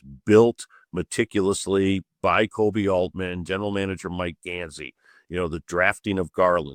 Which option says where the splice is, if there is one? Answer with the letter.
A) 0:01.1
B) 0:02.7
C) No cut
C